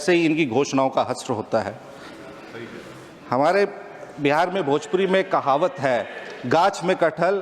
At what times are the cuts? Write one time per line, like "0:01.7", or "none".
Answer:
none